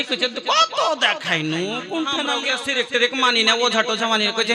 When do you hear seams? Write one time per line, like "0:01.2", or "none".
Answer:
0:02.3